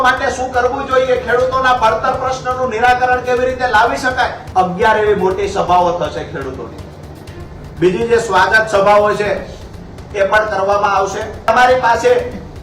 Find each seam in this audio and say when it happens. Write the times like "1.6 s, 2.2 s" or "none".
4.4 s, 11.5 s